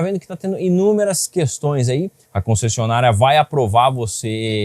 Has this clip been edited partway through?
yes; 1 cut; at 2.2 s

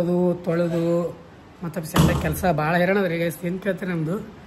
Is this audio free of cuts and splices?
yes; 0 cuts

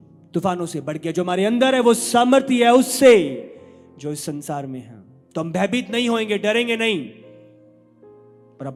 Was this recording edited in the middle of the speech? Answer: no; 0 cuts

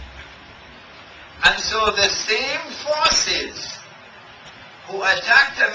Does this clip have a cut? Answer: no; 0 cuts

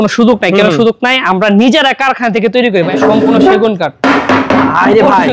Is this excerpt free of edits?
no; 1 cut; at 2.9 s

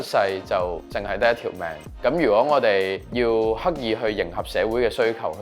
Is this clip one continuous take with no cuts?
no; 3 cuts; at 0.9 s, 1.8 s, 3.0 s

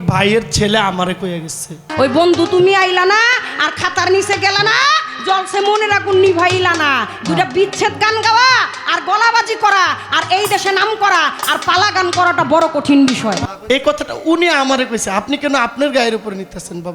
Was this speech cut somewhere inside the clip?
yes; 2 cuts; at 1.8 s, 13.4 s

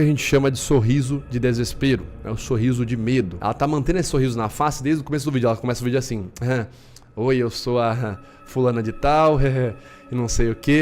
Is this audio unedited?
no; 1 cut; at 3.3 s

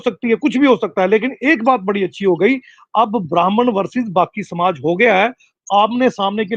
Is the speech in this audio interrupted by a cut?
no; 0 cuts

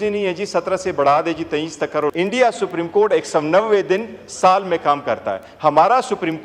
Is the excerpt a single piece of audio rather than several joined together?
no; 1 cut; at 2.1 s

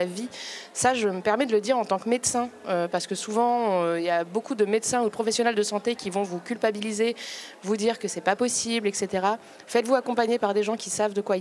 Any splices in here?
no; 0 cuts

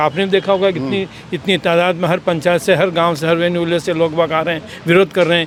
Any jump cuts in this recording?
no; 0 cuts

